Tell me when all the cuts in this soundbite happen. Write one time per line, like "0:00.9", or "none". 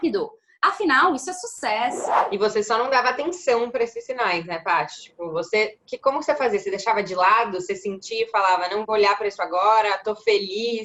0:02.1